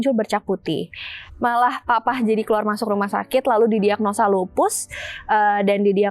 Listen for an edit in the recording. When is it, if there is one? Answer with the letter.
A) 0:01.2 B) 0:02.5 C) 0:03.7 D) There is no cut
A